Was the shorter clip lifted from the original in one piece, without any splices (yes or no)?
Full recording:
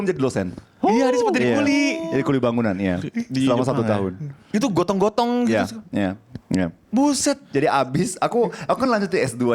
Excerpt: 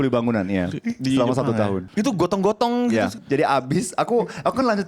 no